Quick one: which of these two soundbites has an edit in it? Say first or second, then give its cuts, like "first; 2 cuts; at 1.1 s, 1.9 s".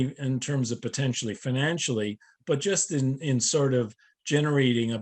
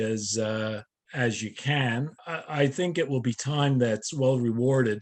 second; 2 cuts; at 1.0 s, 2.2 s